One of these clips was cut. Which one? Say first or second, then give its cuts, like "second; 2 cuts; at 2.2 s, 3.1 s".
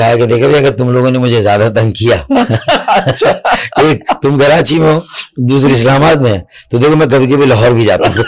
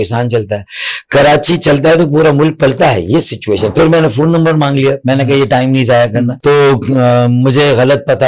second; 2 cuts; at 3.7 s, 6.3 s